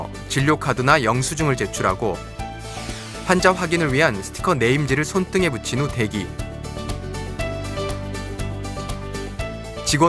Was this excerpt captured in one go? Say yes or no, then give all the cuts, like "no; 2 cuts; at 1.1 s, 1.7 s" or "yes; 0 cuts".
no; 1 cut; at 2.0 s